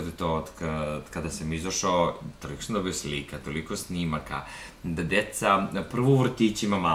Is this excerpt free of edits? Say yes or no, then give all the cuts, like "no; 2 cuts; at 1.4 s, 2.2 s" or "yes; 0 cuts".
yes; 0 cuts